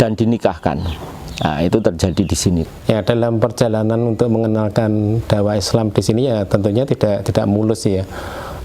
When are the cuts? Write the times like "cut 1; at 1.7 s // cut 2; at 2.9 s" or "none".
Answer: cut 1; at 2.7 s